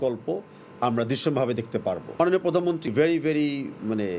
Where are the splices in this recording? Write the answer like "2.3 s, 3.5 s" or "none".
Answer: 2.1 s, 2.9 s